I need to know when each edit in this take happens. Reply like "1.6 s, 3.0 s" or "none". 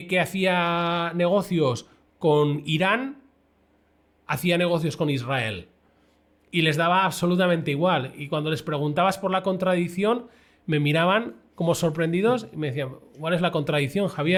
none